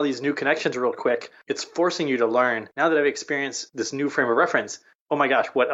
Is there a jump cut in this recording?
yes; 2 cuts; at 1.3 s, 2.7 s

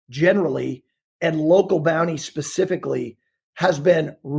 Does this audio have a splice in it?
no; 0 cuts

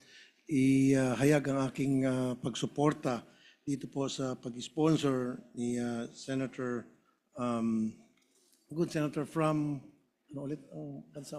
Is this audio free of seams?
yes; 0 cuts

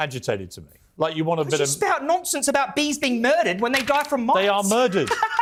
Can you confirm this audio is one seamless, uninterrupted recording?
yes; 0 cuts

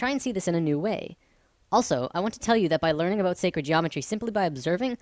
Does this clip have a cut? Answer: no; 0 cuts

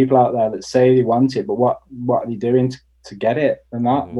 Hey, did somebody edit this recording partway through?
no; 0 cuts

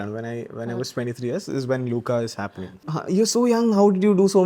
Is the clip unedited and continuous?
no; 1 cut; at 2.9 s

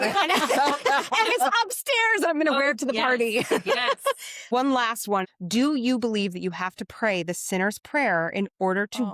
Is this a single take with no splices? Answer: no; 1 cut; at 5.2 s

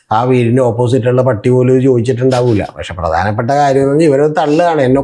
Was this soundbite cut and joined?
no; 0 cuts

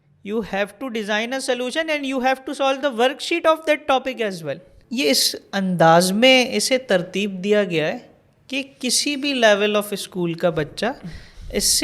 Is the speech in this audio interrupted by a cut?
yes; 1 cut; at 4.7 s

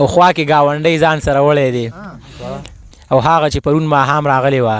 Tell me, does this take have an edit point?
no; 0 cuts

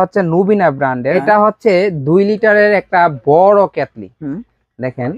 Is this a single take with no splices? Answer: no; 1 cut; at 1.1 s

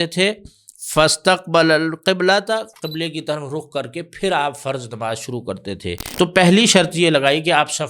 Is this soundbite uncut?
no; 1 cut; at 6.0 s

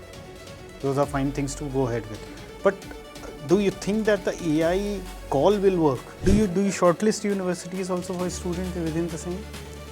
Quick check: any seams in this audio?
yes; 1 cut; at 6.2 s

